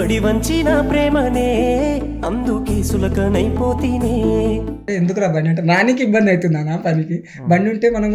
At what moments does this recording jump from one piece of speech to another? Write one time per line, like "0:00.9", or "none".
0:04.8